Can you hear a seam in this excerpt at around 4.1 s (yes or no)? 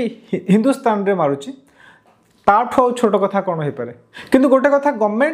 yes